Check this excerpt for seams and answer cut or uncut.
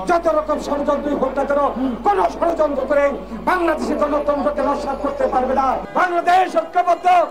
cut